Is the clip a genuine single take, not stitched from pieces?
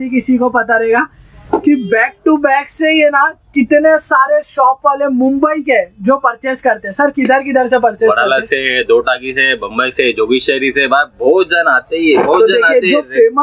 yes; 0 cuts

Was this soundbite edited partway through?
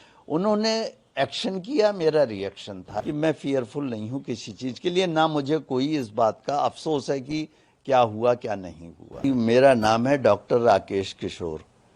yes; 2 cuts; at 3.0 s, 9.2 s

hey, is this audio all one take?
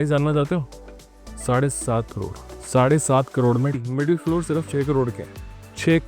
no; 1 cut; at 3.8 s

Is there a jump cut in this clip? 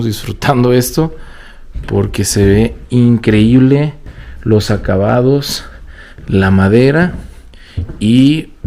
no; 0 cuts

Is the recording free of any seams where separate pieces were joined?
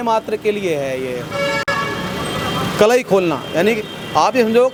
yes; 0 cuts

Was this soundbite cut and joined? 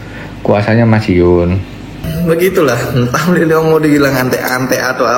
yes; 1 cut; at 2.1 s

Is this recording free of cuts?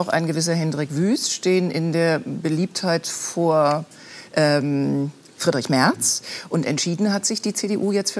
yes; 0 cuts

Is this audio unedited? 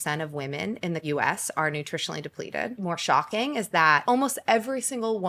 no; 3 cuts; at 1.0 s, 2.7 s, 4.0 s

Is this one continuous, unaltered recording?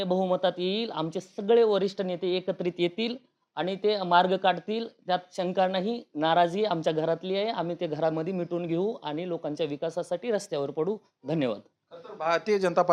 yes; 0 cuts

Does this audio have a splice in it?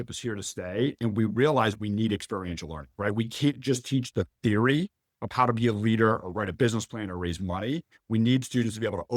no; 0 cuts

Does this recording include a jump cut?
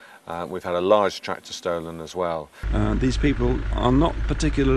yes; 1 cut; at 2.6 s

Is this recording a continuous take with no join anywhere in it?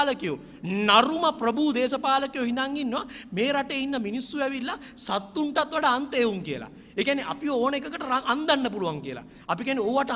yes; 0 cuts

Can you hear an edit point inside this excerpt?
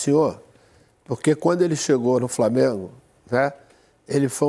no; 0 cuts

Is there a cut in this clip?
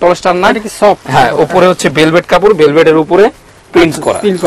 no; 0 cuts

